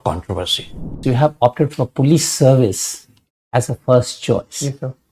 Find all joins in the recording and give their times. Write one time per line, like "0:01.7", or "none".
0:01.0